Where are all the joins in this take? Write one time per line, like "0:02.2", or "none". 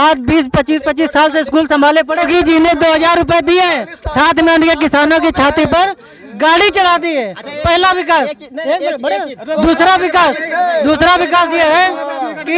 0:02.3